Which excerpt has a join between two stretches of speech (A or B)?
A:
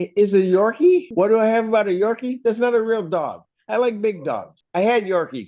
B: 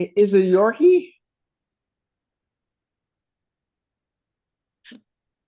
A